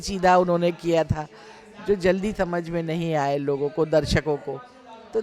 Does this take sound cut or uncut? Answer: uncut